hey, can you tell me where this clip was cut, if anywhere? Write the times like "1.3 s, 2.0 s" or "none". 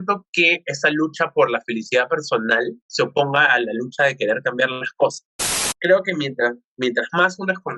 5.6 s